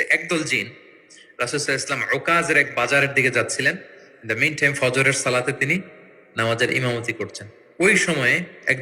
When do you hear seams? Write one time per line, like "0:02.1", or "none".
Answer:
none